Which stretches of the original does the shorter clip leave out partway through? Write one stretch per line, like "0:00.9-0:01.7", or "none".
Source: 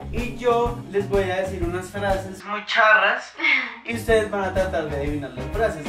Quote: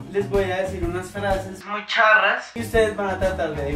0:03.3-0:03.9

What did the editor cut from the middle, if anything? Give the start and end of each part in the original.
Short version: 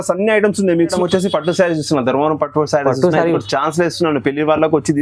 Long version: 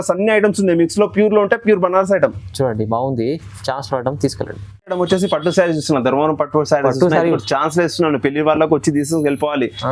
0:00.9-0:04.9

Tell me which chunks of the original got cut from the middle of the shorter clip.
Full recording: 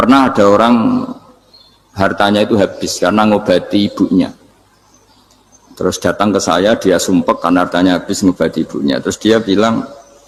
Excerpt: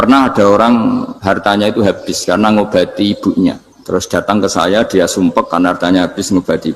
0:01.1-0:01.9
0:04.5-0:05.6

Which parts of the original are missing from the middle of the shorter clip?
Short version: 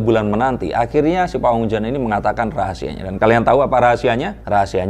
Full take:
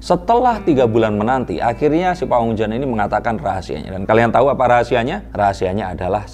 none

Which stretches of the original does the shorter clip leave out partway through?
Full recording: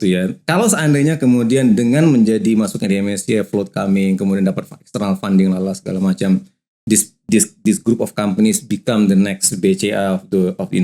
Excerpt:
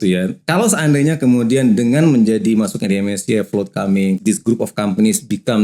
0:04.2-0:07.6

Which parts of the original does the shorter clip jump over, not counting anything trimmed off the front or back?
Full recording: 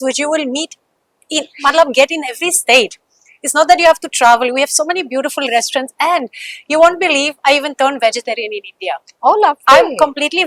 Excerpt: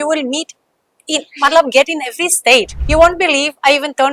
0:03.0-0:06.6

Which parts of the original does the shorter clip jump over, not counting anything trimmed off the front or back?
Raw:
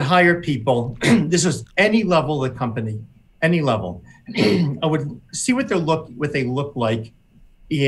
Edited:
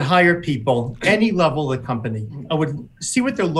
0:00.9-0:01.7
0:03.1-0:04.7

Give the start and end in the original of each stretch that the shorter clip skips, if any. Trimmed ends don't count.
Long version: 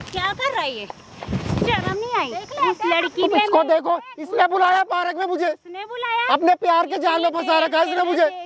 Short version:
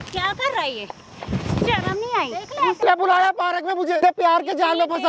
0:02.8-0:04.3
0:05.5-0:06.5

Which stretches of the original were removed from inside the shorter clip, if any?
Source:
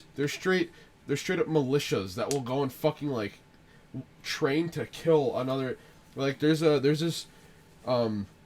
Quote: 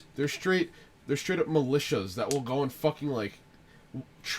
none

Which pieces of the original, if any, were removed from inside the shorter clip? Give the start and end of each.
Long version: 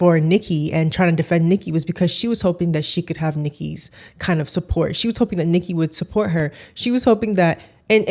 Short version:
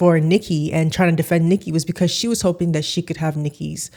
none

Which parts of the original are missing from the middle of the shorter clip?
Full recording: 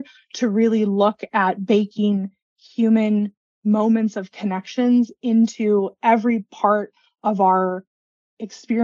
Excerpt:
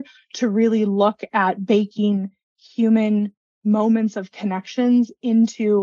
none

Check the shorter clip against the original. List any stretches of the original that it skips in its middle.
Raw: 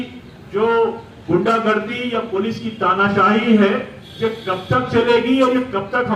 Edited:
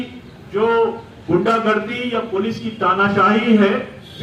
none

